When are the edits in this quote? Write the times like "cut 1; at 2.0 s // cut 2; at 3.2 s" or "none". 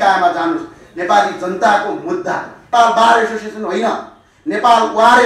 cut 1; at 2.6 s

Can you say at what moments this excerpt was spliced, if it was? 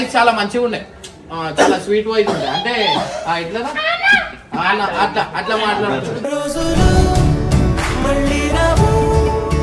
none

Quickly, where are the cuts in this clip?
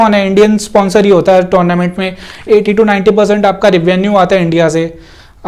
cut 1; at 2.4 s

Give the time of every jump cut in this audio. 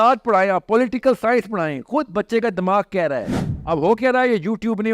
cut 1; at 3.5 s

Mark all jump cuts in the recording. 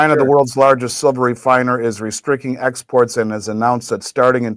none

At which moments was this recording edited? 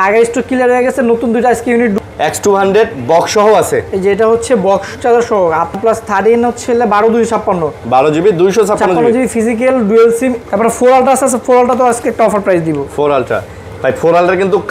cut 1; at 2.0 s // cut 2; at 5.8 s // cut 3; at 10.4 s

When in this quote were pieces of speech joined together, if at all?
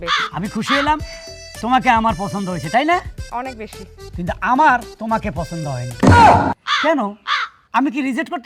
none

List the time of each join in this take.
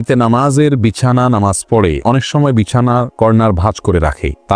none

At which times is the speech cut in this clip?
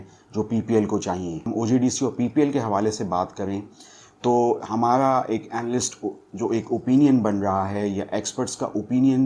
cut 1; at 1.4 s

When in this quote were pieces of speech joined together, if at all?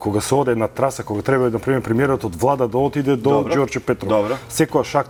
none

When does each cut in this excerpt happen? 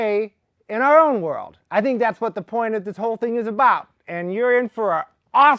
cut 1; at 2.5 s

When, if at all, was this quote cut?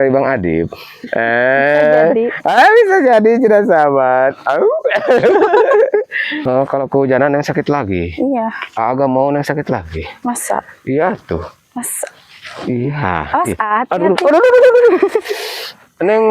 cut 1; at 6.4 s

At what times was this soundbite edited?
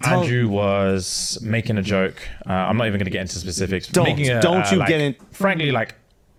none

